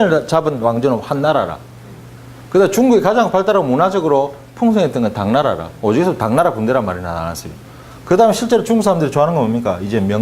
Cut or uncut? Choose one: cut